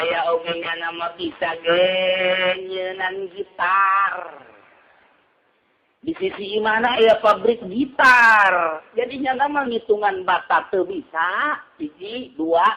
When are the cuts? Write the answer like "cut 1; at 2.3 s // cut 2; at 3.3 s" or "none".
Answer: none